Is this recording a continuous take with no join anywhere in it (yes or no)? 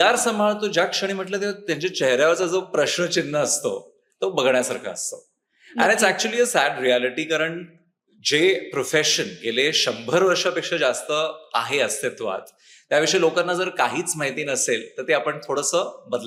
yes